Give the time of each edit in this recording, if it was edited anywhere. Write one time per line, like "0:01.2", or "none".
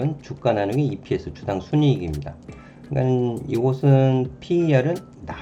none